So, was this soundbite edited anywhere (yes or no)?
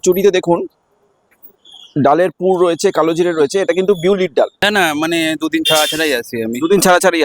yes